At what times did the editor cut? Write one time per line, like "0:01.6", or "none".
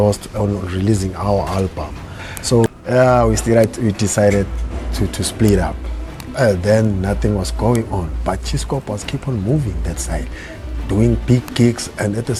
none